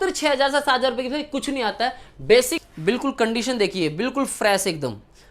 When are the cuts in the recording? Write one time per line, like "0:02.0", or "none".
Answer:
0:02.6